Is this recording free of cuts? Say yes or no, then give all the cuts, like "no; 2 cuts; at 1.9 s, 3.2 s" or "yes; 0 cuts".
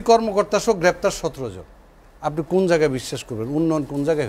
yes; 0 cuts